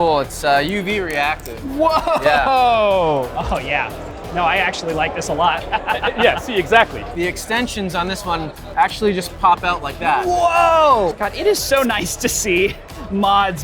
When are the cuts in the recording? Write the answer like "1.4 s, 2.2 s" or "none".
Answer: 3.3 s, 7.0 s, 11.1 s